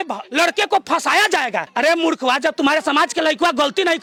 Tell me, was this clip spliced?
no; 0 cuts

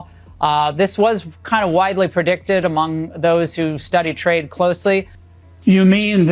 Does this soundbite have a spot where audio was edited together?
yes; 1 cut; at 5.2 s

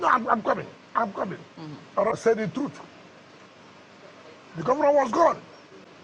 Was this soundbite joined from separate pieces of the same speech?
yes; 1 cut; at 2.1 s

